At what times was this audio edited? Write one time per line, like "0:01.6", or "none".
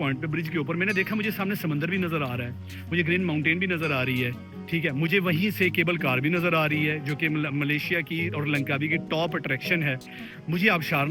none